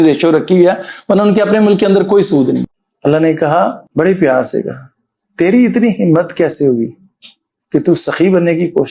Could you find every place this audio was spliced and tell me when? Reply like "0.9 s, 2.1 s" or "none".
2.7 s